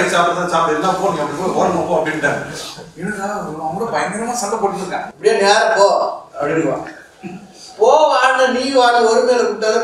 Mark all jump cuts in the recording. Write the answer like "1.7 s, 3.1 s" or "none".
5.1 s